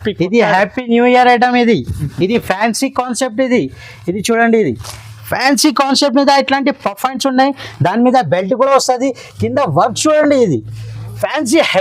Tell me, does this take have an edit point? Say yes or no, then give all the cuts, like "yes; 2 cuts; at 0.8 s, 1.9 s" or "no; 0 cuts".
no; 0 cuts